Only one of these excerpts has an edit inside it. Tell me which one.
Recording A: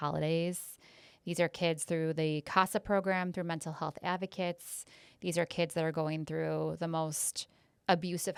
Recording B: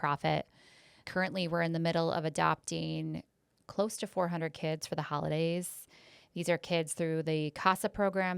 B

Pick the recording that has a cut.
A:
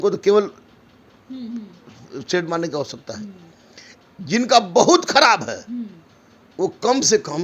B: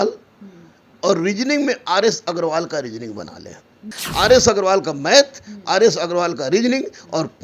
B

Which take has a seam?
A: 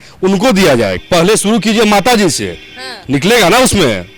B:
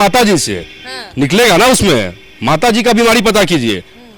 A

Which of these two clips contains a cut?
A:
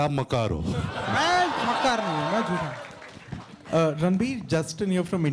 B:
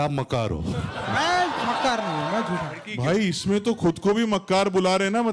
B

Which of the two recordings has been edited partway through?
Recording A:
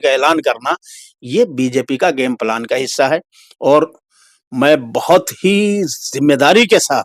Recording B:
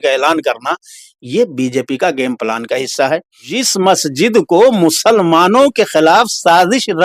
B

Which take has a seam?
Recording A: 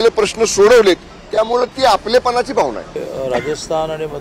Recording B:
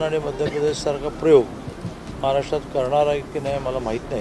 A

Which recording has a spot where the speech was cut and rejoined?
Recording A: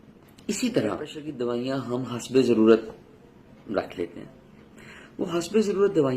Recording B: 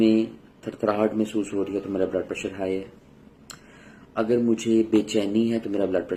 A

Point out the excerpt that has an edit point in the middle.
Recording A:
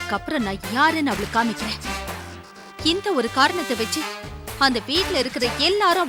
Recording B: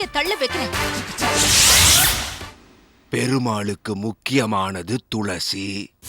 B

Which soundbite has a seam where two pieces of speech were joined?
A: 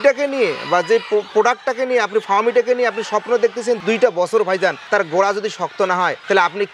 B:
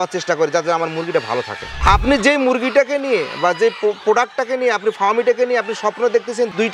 B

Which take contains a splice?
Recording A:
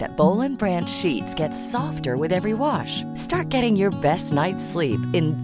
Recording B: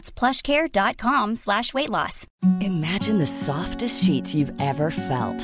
B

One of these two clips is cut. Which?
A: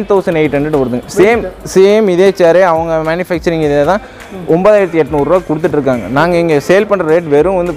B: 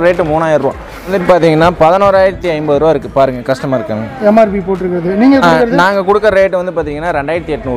B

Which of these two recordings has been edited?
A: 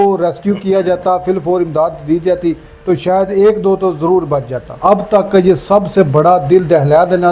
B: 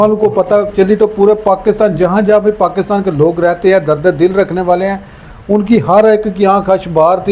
A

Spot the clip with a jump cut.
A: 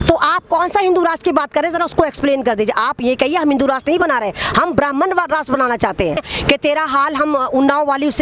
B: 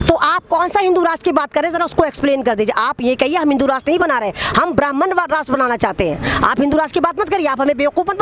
A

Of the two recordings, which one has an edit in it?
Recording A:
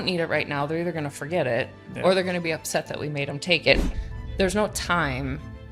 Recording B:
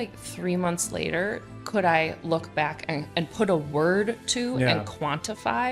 A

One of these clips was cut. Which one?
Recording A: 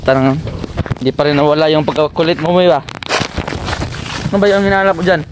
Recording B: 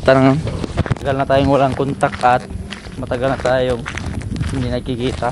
B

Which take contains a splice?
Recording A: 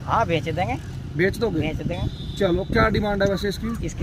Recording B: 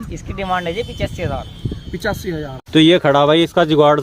B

